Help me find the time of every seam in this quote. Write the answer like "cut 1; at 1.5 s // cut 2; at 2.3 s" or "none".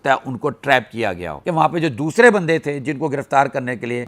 cut 1; at 1.4 s

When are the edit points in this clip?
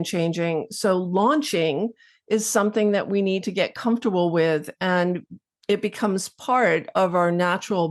none

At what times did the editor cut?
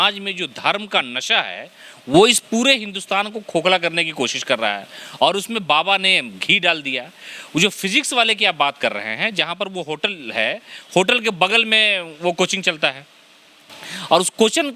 none

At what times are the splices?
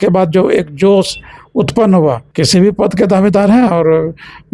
cut 1; at 2.3 s

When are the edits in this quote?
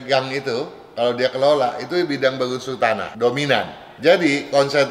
cut 1; at 3.1 s // cut 2; at 3.8 s

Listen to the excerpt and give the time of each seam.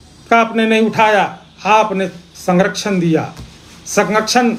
none

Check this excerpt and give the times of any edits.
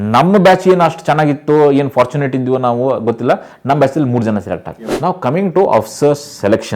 cut 1; at 4.8 s

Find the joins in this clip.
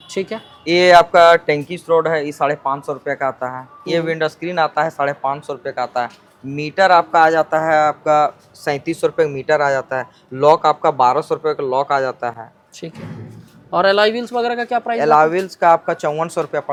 none

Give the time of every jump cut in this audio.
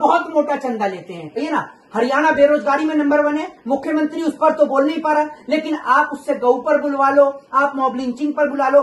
cut 1; at 1.3 s

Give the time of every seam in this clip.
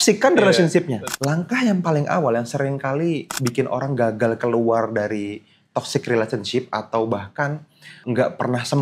cut 1; at 1.1 s

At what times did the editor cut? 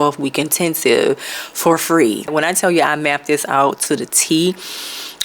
cut 1; at 2.3 s

